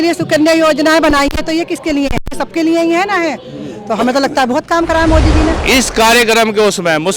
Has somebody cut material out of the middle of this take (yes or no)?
yes